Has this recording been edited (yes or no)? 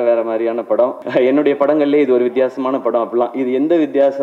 yes